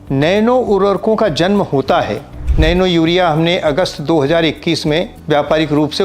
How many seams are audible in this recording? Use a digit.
2